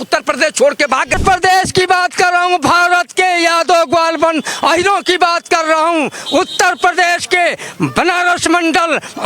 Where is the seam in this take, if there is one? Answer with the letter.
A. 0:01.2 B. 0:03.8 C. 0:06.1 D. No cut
A